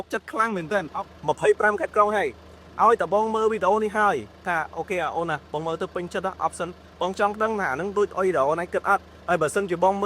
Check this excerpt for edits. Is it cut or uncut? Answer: cut